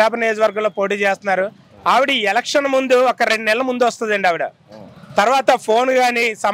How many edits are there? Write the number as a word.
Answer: zero